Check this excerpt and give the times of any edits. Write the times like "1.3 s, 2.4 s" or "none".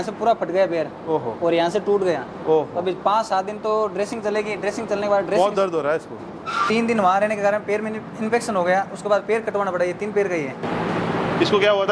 6.7 s, 10.6 s